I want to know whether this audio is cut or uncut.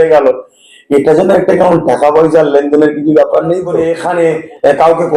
cut